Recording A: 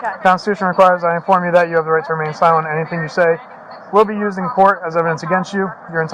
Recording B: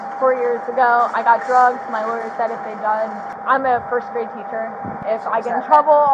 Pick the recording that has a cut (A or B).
B